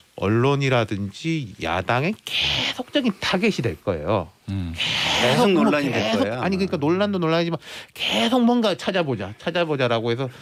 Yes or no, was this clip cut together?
no